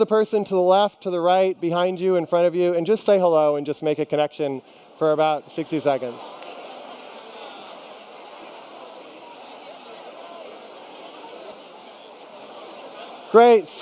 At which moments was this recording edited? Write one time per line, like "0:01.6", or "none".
0:01.4